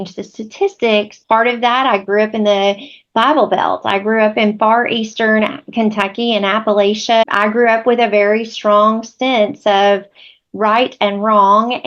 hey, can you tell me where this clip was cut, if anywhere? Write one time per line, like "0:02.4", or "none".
0:01.1
0:07.2